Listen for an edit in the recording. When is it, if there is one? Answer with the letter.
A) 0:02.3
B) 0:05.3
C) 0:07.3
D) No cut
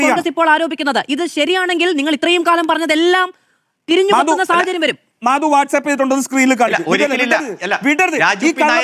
B